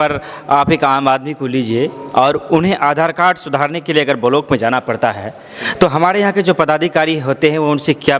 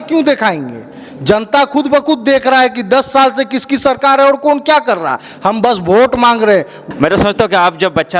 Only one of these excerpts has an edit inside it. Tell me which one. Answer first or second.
second